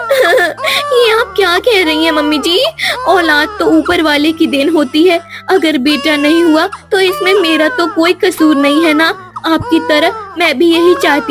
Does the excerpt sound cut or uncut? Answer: uncut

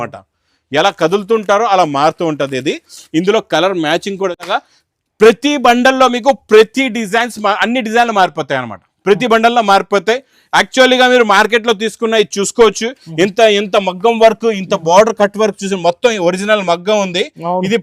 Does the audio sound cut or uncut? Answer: cut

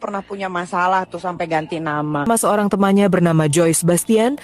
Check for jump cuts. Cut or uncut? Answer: cut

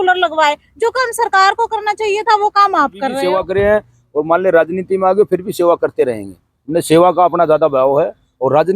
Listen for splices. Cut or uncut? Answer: cut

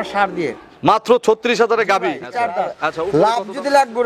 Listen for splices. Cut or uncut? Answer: cut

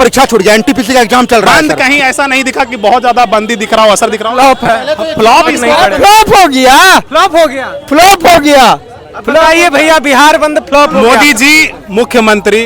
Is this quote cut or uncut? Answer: cut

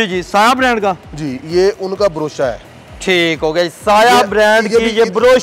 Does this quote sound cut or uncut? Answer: uncut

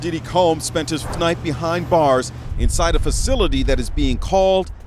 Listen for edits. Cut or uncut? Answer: cut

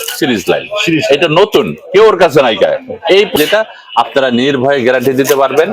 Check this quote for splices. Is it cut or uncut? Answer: cut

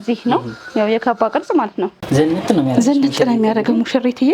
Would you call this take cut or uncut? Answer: cut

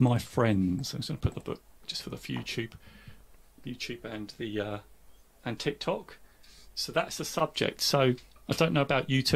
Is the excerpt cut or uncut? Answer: cut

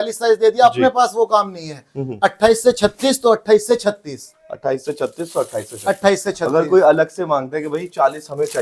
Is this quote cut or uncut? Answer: uncut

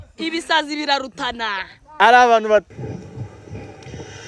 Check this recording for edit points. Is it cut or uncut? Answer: cut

